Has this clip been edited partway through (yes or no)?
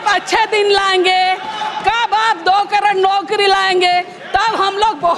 no